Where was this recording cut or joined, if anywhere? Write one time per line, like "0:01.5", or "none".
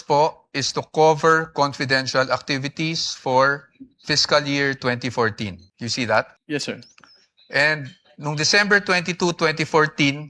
0:05.7
0:06.4